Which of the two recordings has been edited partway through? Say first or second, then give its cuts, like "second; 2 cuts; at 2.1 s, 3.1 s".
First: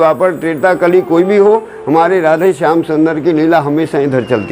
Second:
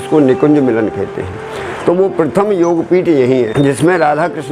second; 1 cut; at 3.5 s